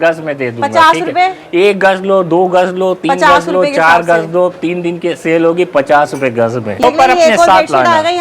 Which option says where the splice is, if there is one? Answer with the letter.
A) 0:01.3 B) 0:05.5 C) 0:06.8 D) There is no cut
C